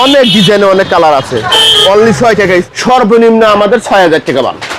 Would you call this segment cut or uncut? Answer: cut